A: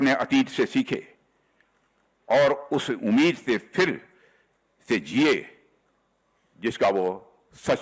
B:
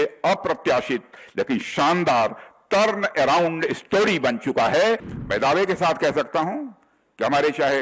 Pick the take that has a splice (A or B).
B